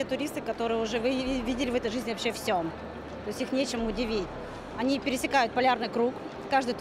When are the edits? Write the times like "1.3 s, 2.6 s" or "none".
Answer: none